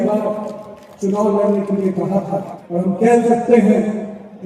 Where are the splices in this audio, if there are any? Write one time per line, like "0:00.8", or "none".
0:02.6